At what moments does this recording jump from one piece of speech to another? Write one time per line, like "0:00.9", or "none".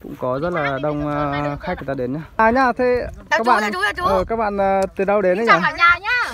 0:02.4